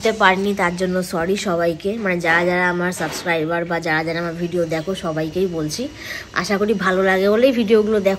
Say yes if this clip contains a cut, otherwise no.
no